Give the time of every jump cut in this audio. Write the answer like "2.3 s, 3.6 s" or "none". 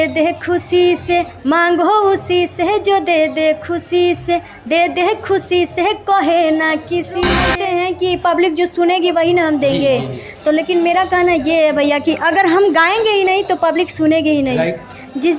7.5 s

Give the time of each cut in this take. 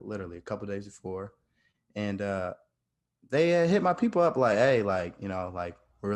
none

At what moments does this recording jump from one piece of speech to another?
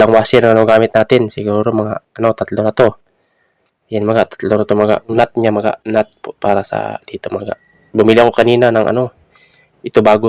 5.1 s

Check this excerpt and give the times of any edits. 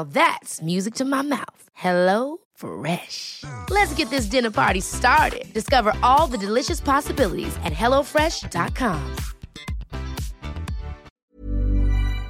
11.3 s

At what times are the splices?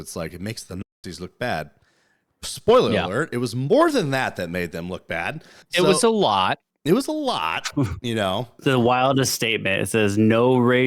5.5 s, 8.5 s

